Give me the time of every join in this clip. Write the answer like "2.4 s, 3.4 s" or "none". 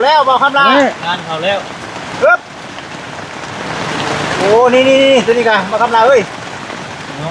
none

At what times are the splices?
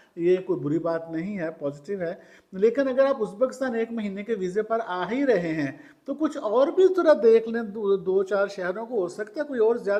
none

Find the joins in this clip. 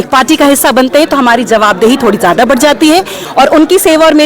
3.2 s

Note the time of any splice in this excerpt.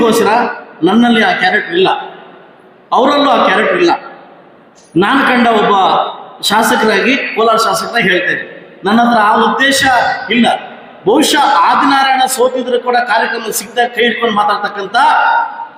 none

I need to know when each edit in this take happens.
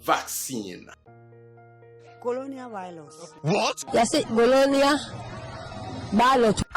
1.0 s

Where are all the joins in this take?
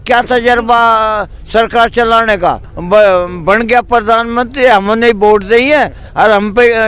2.7 s

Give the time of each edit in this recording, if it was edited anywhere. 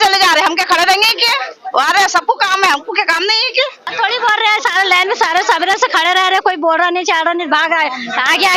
none

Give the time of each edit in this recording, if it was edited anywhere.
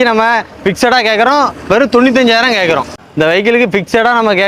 2.9 s

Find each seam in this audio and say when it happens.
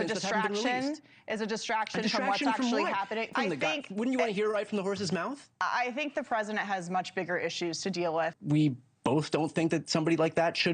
3.3 s, 8.4 s

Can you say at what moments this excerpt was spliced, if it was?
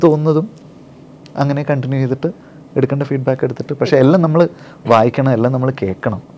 none

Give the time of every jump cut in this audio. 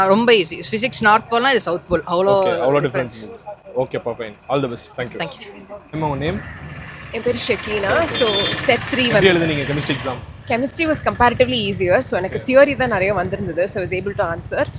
none

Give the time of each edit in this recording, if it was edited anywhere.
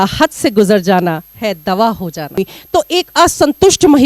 2.4 s

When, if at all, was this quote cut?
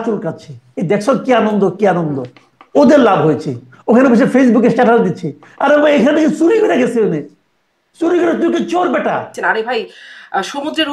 9.3 s

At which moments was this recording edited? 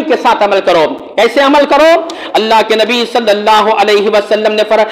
none

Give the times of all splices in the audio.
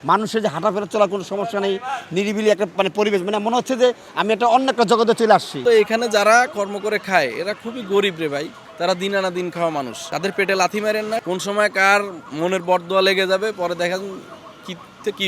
5.6 s, 8.6 s, 10.0 s, 11.2 s

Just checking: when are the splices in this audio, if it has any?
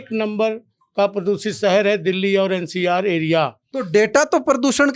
3.7 s

